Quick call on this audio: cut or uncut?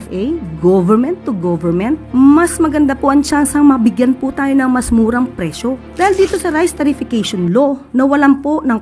cut